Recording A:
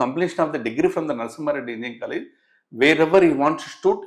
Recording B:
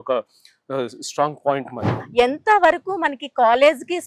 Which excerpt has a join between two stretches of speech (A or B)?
B